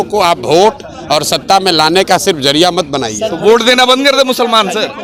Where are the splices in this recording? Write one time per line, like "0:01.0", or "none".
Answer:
none